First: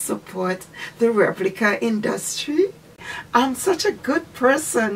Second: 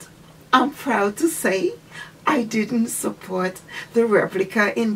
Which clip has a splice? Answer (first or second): first